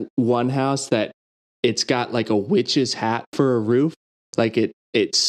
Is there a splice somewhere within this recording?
no; 0 cuts

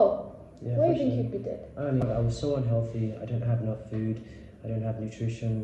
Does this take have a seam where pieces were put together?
no; 0 cuts

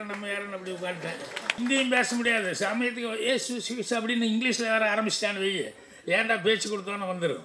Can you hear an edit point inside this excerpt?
yes; 1 cut; at 1.6 s

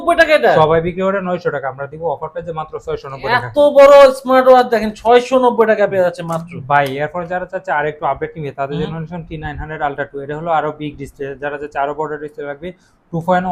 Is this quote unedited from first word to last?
yes; 0 cuts

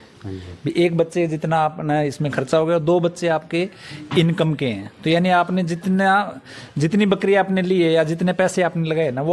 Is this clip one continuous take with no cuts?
yes; 0 cuts

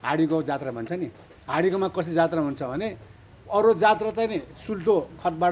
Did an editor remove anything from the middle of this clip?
no; 0 cuts

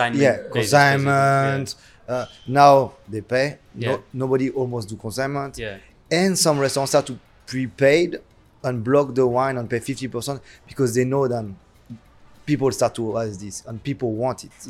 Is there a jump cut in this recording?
no; 0 cuts

